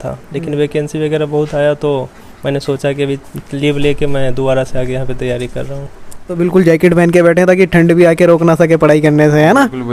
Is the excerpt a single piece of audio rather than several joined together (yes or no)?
no